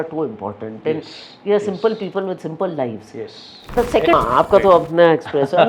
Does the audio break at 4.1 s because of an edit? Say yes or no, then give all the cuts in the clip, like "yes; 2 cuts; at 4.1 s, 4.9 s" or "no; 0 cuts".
yes; 1 cut; at 4.1 s